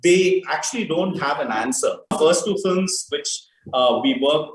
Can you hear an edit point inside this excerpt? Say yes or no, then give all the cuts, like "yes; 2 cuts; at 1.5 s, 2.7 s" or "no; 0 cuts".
yes; 1 cut; at 2.1 s